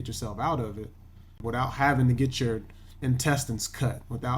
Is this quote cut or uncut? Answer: cut